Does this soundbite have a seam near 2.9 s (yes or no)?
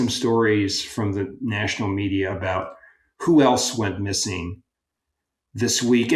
no